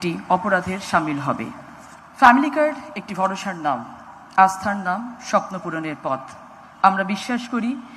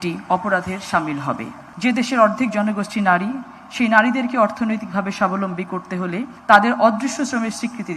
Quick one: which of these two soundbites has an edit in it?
second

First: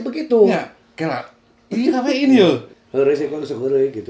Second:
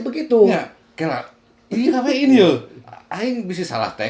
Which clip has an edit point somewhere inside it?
first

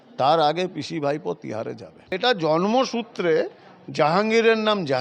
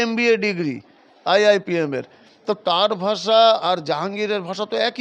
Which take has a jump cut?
first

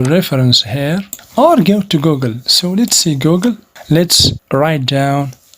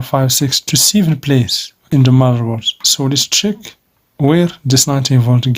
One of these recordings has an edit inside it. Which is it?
first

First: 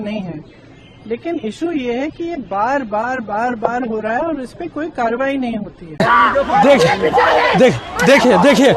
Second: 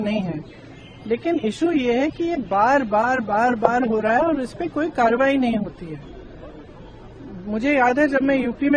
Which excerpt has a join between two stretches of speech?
first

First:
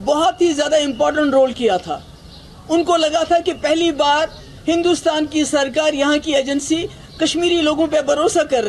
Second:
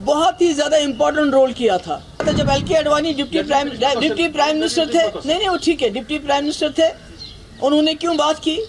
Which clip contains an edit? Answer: second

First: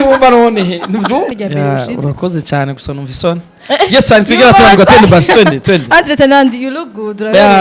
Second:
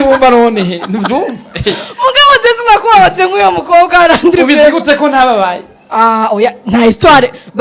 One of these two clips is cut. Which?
first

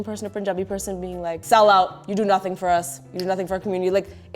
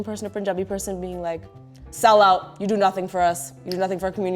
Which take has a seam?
first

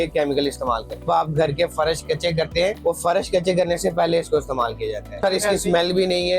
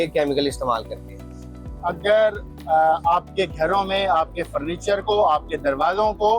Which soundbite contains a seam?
first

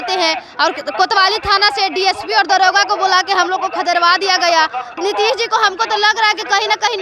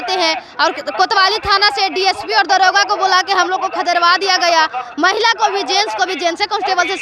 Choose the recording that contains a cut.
first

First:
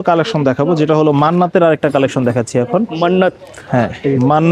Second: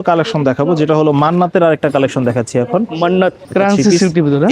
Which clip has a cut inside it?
second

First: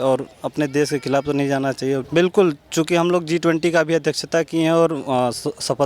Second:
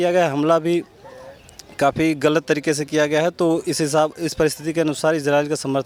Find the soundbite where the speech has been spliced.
first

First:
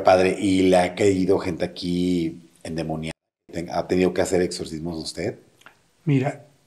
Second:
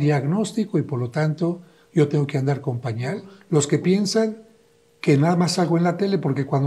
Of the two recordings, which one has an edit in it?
second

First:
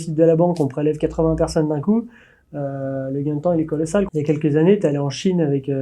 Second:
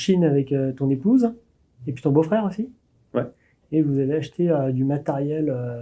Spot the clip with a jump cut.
first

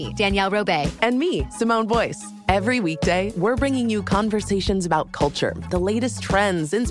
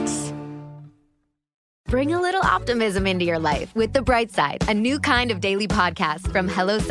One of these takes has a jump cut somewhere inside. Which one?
second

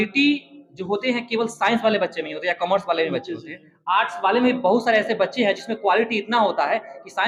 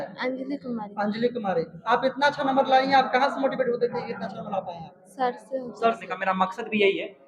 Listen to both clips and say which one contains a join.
second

